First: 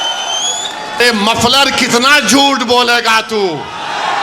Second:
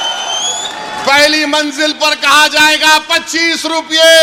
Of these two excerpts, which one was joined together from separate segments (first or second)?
first